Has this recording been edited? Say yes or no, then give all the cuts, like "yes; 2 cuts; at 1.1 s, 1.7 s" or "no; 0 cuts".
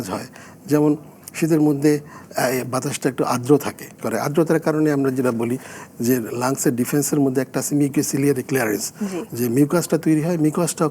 yes; 1 cut; at 4.0 s